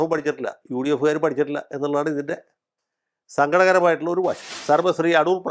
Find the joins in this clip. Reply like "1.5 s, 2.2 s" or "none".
4.5 s

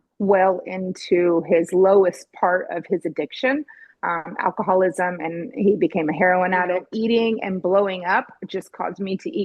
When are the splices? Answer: 6.9 s

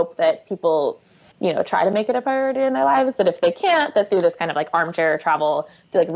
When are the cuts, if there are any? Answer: 1.3 s

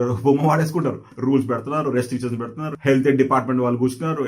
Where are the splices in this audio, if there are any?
1.1 s, 2.6 s

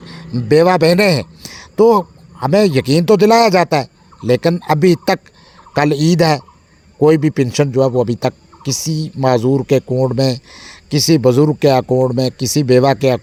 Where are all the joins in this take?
none

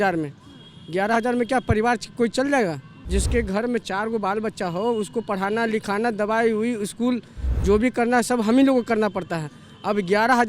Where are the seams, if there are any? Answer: 2.9 s

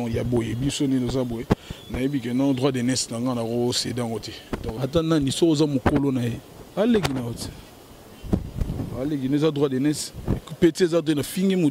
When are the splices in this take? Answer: 4.8 s

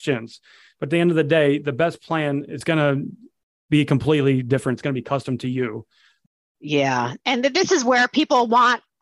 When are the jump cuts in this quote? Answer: 2.5 s

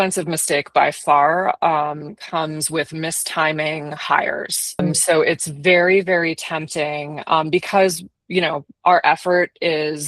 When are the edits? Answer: none

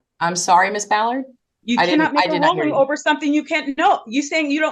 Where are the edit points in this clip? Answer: none

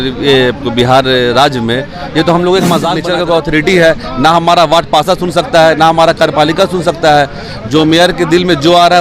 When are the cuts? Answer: 3.0 s

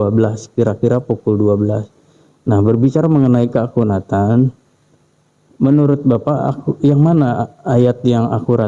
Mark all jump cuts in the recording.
none

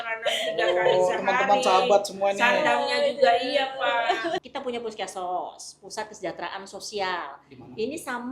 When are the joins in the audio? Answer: 4.4 s

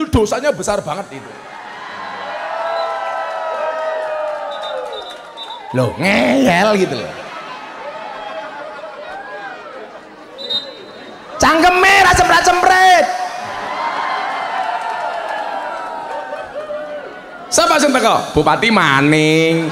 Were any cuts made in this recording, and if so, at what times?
none

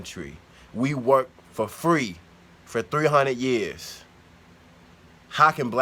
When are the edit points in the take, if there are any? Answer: none

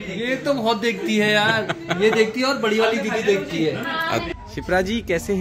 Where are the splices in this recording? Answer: 4.3 s

